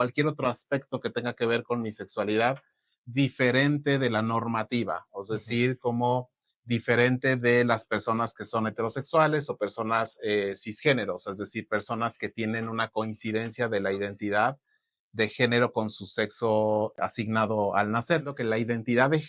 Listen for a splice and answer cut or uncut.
cut